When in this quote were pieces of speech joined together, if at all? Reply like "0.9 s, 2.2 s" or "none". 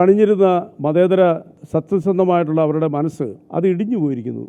1.5 s, 3.4 s